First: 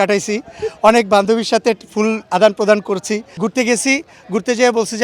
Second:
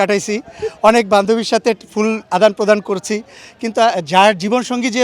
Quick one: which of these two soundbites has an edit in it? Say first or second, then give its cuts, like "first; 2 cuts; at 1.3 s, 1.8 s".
first; 1 cut; at 3.2 s